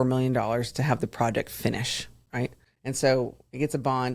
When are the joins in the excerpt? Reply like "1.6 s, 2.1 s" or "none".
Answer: 2.7 s